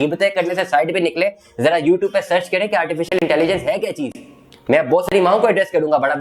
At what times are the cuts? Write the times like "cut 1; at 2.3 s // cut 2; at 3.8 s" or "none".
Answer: none

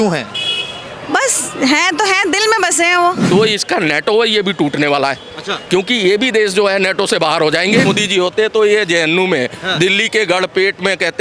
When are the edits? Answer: cut 1; at 3.2 s // cut 2; at 7.9 s

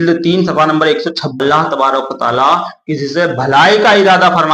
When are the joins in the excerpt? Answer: cut 1; at 1.3 s

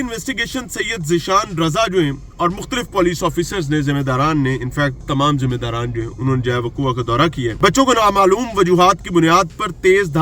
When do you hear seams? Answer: none

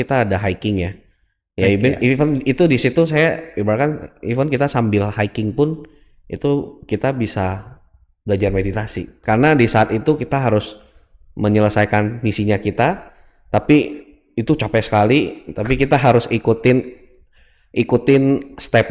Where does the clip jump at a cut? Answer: cut 1; at 9.1 s

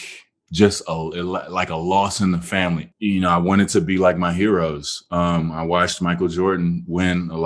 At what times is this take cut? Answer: cut 1; at 2.8 s

